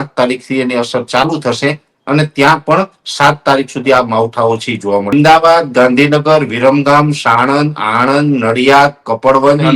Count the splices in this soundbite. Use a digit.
1